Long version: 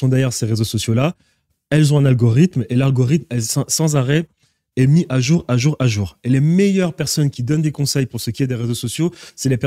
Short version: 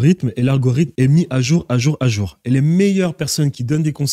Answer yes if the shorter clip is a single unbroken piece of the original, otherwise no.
no